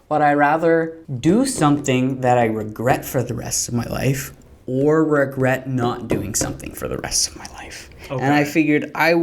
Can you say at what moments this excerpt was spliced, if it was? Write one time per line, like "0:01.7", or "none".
0:01.0